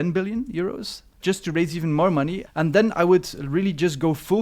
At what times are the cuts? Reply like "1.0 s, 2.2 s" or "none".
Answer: 1.2 s

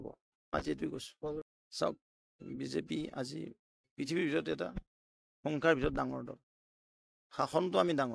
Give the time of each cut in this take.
1.6 s

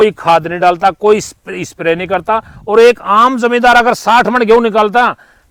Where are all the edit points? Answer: none

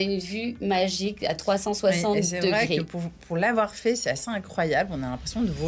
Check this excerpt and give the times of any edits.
none

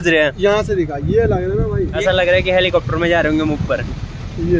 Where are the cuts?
1.9 s

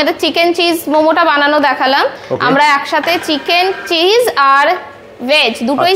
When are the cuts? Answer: none

